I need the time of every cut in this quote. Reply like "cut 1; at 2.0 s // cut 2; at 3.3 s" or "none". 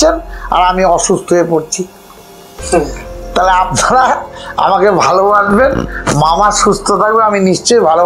none